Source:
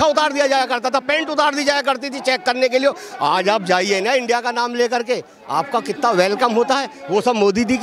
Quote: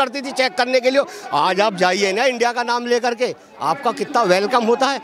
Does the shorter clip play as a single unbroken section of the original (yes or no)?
yes